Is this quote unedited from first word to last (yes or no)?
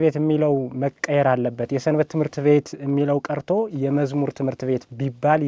yes